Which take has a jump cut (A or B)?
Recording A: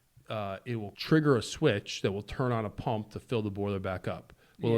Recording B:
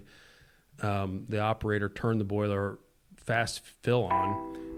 A